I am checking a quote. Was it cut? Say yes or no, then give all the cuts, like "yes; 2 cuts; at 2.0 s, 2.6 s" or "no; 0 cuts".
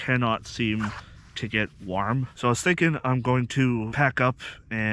yes; 2 cuts; at 2.3 s, 3.9 s